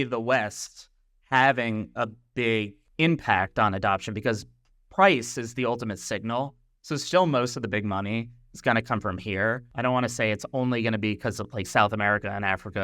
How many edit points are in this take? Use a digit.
2